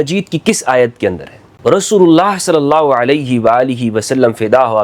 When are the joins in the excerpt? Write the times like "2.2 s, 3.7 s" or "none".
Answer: 1.4 s